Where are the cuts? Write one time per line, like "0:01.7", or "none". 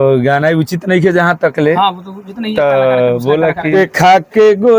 0:03.7